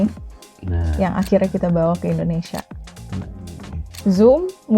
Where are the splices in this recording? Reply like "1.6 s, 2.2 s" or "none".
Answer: 3.8 s